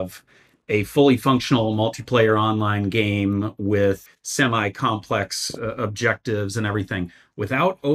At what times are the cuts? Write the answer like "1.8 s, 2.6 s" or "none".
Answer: 4.1 s